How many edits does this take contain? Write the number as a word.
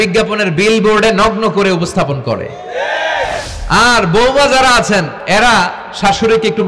two